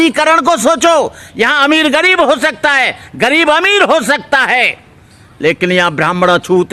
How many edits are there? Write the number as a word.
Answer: zero